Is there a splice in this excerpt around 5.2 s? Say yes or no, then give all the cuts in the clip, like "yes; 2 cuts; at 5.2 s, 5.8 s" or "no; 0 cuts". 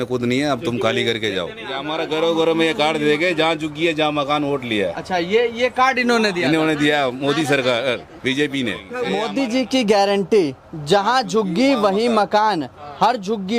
no; 2 cuts; at 1.7 s, 8.9 s